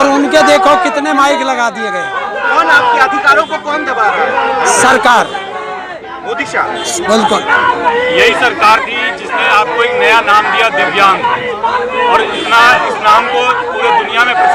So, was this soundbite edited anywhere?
no; 0 cuts

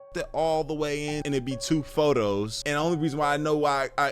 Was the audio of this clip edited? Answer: yes; 2 cuts; at 1.2 s, 2.6 s

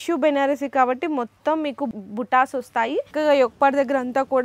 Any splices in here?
yes; 1 cut; at 3.1 s

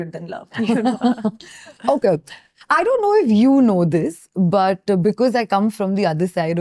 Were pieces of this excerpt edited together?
no; 0 cuts

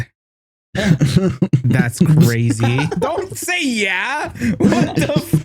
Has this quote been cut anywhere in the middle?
no; 0 cuts

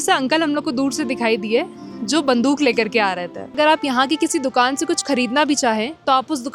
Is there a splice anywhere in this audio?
yes; 1 cut; at 3.5 s

